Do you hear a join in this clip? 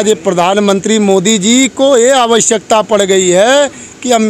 no; 0 cuts

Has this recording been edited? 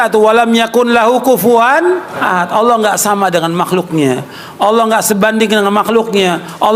yes; 1 cut; at 2.1 s

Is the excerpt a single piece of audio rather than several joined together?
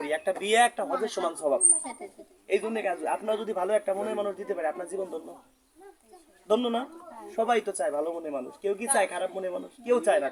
yes; 0 cuts

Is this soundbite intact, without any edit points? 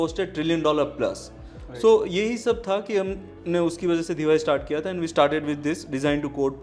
yes; 0 cuts

